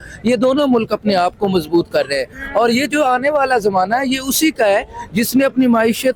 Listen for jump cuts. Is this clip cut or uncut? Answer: uncut